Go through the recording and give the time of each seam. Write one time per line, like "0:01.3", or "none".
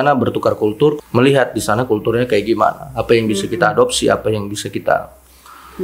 0:01.0